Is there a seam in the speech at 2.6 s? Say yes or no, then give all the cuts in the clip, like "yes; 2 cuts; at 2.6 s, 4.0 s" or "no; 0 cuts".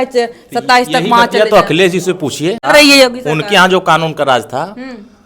yes; 1 cut; at 2.6 s